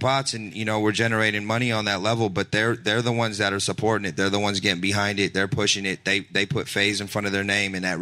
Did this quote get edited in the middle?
no; 0 cuts

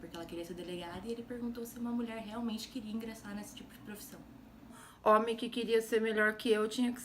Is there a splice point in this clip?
yes; 1 cut; at 4.7 s

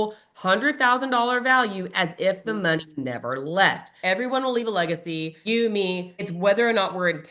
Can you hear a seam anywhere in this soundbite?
yes; 3 cuts; at 3.9 s, 5.3 s, 6.2 s

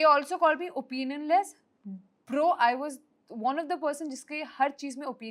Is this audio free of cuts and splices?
yes; 0 cuts

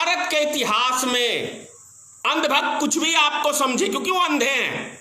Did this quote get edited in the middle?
no; 0 cuts

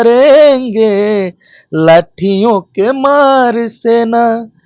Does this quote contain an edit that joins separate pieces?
no; 0 cuts

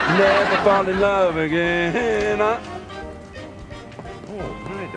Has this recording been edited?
yes; 1 cut; at 2.1 s

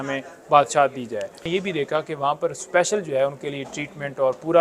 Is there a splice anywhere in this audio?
yes; 1 cut; at 1.4 s

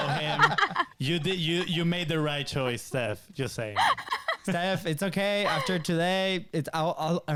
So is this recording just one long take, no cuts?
yes; 0 cuts

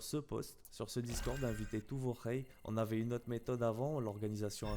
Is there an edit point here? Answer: yes; 1 cut; at 2.5 s

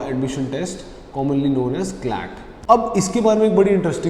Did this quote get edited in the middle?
yes; 1 cut; at 2.3 s

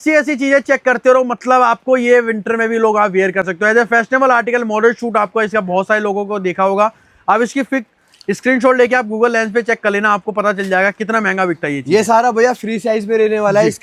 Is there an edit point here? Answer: no; 0 cuts

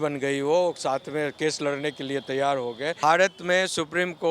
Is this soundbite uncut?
no; 1 cut; at 3.0 s

